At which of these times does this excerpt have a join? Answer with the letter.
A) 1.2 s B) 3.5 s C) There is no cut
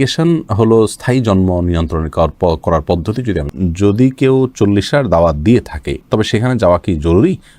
B